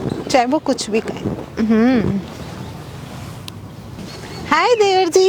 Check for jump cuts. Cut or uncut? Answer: cut